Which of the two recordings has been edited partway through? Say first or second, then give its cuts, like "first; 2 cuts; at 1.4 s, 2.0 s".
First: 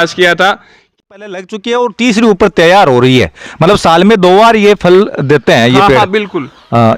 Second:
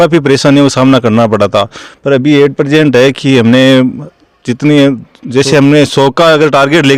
first; 1 cut; at 1.0 s